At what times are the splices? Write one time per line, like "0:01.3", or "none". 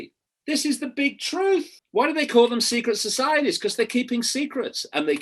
0:01.8